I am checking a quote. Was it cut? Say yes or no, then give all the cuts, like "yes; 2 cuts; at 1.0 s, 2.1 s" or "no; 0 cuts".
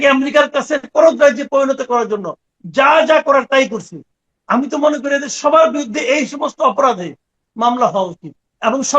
yes; 1 cut; at 0.9 s